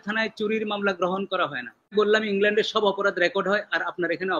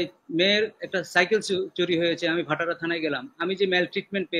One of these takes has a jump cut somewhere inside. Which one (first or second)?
first